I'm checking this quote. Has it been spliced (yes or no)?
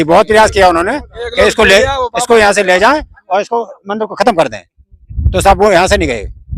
no